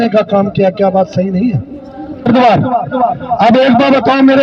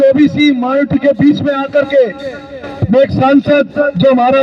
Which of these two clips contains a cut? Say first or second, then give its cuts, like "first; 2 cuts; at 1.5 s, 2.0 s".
first; 1 cut; at 2.3 s